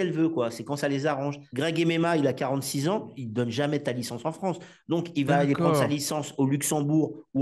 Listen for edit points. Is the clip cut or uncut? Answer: cut